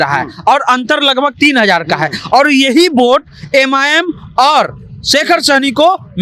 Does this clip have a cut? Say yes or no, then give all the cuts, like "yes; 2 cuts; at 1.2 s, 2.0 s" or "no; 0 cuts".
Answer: no; 0 cuts